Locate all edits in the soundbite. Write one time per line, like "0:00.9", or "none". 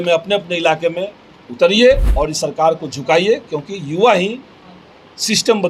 0:02.1